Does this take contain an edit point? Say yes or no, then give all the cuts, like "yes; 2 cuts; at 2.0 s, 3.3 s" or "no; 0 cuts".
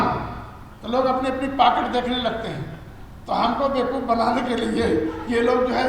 no; 0 cuts